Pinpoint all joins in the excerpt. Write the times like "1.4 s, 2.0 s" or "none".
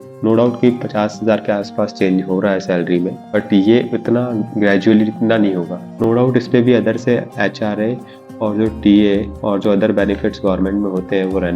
3.4 s, 6.0 s